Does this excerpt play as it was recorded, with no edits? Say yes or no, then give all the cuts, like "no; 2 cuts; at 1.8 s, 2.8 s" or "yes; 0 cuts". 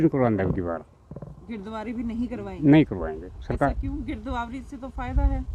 yes; 0 cuts